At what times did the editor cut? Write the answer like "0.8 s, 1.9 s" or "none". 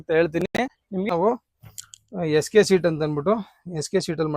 1.1 s